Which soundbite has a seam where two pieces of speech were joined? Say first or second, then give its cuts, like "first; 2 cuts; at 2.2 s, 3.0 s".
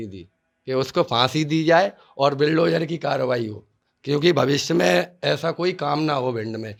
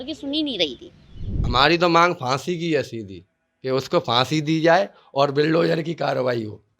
second; 1 cut; at 1.4 s